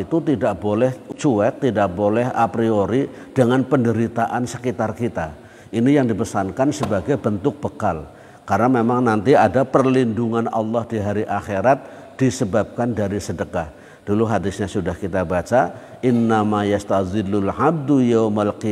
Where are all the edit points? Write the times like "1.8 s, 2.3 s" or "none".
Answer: 1.1 s